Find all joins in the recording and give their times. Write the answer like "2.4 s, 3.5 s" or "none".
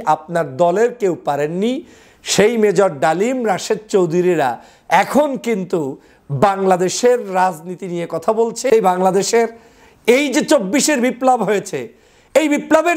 8.7 s